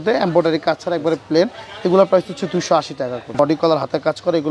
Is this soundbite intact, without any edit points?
no; 1 cut; at 3.4 s

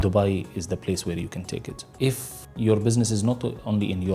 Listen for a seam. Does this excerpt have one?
yes; 1 cut; at 2.0 s

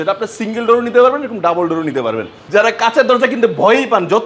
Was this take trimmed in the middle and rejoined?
yes; 1 cut; at 2.3 s

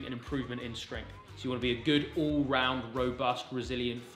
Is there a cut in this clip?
no; 0 cuts

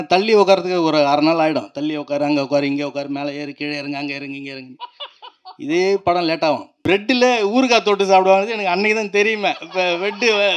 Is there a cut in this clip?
yes; 1 cut; at 6.7 s

